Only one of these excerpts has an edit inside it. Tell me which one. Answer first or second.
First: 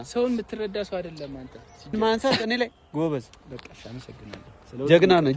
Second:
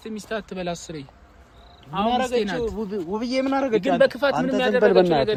first